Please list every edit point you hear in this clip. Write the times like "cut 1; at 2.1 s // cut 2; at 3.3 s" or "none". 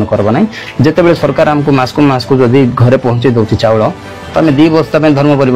none